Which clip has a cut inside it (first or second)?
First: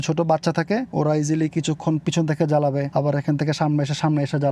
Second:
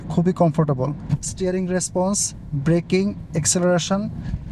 first